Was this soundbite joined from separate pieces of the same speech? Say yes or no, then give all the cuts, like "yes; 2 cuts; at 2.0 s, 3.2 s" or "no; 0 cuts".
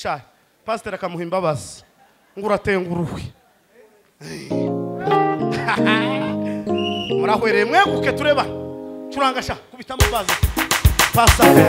no; 0 cuts